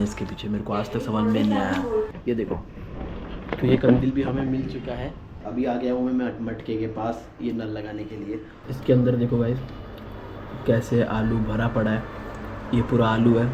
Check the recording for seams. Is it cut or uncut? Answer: cut